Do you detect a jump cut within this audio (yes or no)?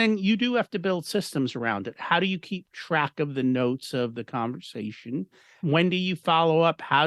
yes